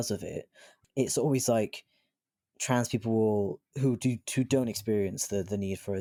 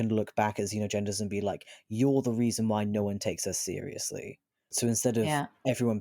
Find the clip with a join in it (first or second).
second